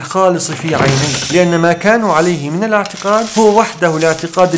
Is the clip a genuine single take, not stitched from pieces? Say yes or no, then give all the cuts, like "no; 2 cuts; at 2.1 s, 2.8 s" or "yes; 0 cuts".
yes; 0 cuts